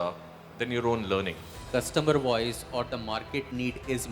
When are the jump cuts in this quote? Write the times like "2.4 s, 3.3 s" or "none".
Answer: 1.6 s